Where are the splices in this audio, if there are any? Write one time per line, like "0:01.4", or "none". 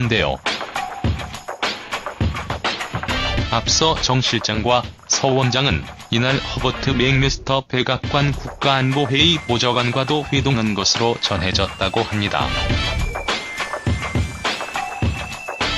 0:09.3